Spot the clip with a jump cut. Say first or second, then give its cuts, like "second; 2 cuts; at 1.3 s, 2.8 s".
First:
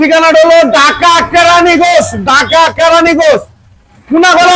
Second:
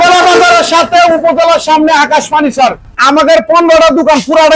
second; 1 cut; at 3.0 s